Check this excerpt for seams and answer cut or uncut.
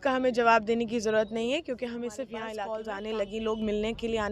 cut